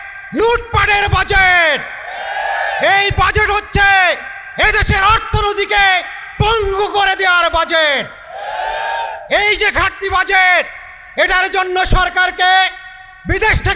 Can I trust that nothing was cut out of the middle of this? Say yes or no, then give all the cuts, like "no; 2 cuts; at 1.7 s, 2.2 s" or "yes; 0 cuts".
yes; 0 cuts